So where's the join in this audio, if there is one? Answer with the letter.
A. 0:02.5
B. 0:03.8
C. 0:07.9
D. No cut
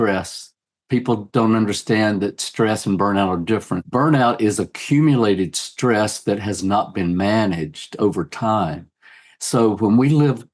B